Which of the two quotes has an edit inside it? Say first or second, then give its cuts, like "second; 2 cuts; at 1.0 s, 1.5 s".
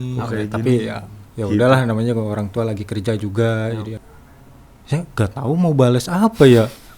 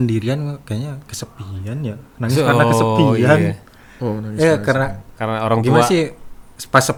first; 1 cut; at 4.0 s